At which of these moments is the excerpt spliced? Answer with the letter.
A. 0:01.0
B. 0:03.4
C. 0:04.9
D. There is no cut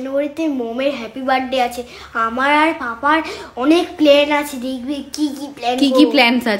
D